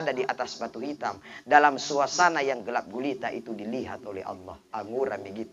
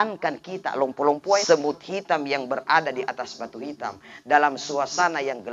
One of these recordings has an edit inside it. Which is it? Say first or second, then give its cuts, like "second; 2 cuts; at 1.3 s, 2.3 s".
second; 1 cut; at 1.4 s